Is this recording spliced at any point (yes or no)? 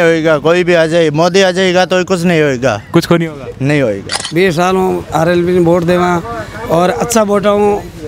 yes